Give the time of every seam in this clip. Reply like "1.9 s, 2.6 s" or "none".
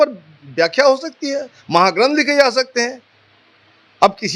none